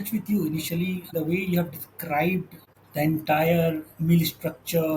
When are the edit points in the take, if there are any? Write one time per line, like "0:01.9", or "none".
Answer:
0:01.1
0:02.6